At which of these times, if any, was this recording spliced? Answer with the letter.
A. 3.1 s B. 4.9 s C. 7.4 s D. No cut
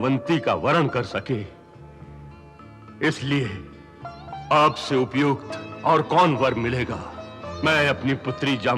C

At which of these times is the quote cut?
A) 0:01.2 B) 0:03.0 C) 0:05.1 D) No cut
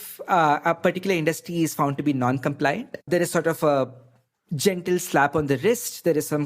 B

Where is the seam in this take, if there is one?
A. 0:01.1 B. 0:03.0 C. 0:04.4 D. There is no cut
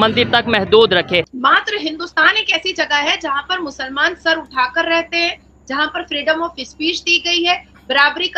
A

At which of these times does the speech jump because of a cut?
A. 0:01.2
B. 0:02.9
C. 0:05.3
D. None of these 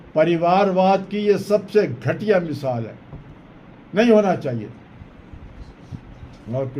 D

